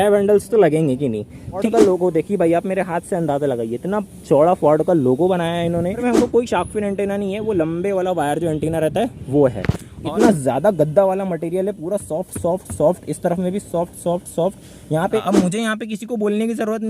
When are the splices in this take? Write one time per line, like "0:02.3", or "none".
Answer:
0:01.7
0:06.0
0:10.0
0:15.2

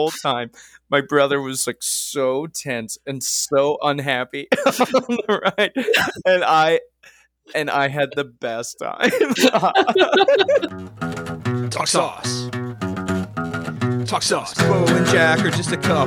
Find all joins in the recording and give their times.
0:10.7

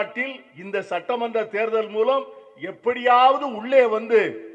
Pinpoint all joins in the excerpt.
none

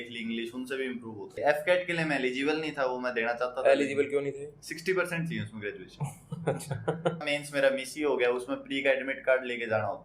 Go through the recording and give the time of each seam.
0:01.3
0:07.3

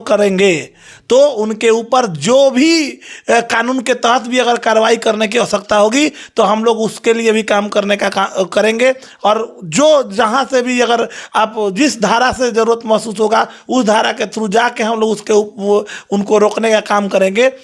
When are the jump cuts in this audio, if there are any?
none

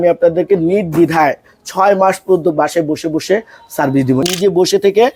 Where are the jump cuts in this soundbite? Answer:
0:04.2

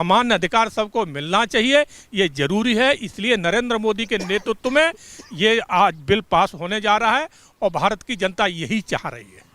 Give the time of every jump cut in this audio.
none

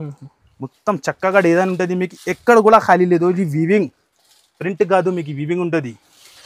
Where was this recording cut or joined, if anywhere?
none

